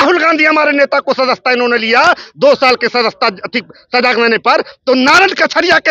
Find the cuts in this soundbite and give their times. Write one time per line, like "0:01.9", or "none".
none